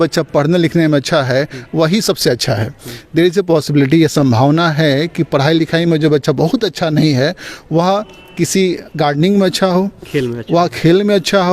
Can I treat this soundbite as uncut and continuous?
yes; 0 cuts

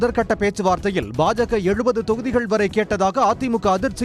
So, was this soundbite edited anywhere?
no; 0 cuts

